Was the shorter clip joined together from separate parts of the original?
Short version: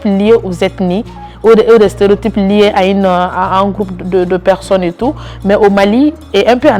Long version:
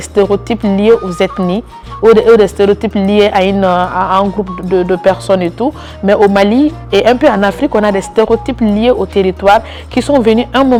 no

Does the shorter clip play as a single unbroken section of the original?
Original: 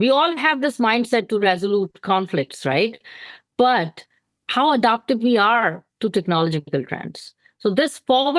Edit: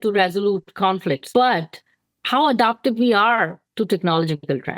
no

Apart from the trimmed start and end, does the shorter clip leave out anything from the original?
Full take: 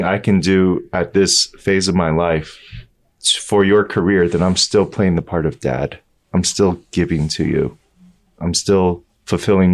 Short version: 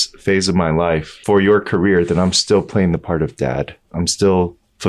yes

